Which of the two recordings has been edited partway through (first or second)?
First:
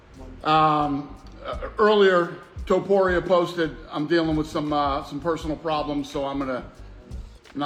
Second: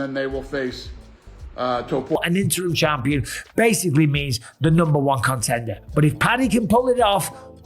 second